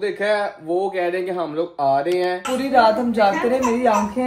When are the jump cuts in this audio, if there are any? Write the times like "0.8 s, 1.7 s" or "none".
2.5 s

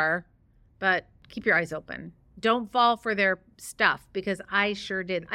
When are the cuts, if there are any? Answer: 1.2 s

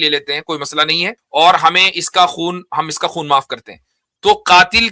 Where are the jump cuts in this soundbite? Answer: 1.2 s

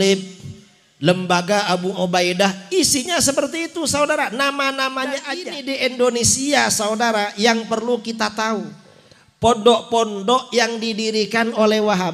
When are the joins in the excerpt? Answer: 5.5 s

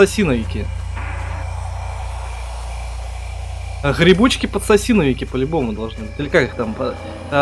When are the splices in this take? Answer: none

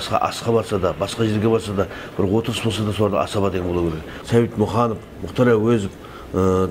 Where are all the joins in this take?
4.1 s

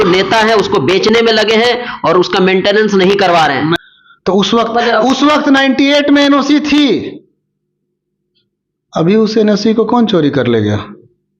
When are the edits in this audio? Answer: 3.8 s

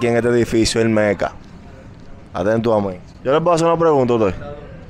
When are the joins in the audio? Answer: none

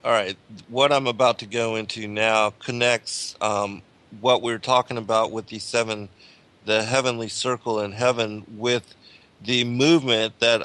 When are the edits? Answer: 4.2 s

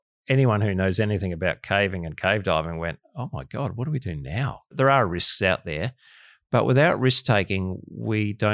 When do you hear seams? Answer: 4.7 s

